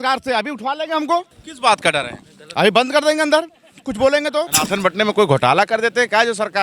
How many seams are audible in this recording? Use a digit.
2